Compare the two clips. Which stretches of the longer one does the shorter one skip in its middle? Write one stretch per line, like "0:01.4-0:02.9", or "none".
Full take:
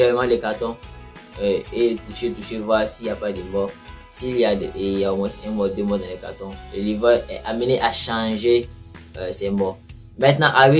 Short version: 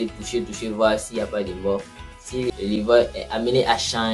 0:04.4-0:06.6